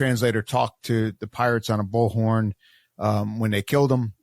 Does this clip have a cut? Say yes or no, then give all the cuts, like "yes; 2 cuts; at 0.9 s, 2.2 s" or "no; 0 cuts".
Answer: no; 0 cuts